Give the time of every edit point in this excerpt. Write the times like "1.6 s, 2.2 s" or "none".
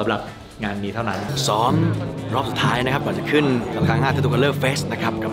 1.3 s, 3.7 s